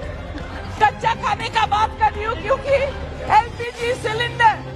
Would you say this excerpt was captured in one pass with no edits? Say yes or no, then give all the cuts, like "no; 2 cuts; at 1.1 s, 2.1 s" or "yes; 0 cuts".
no; 1 cut; at 3.1 s